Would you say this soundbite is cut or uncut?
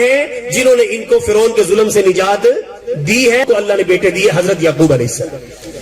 cut